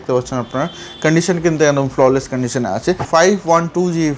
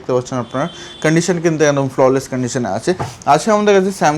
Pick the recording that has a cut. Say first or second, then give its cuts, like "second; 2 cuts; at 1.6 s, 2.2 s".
first; 1 cut; at 3.0 s